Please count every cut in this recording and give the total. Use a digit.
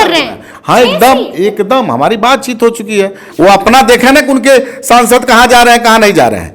1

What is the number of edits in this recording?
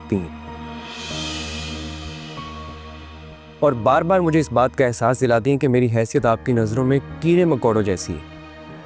0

